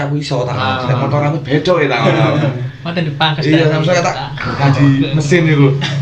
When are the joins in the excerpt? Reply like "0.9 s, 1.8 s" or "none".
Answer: none